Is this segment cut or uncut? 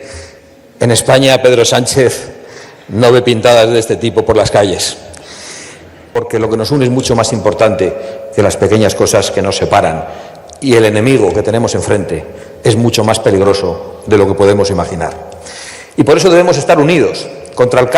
cut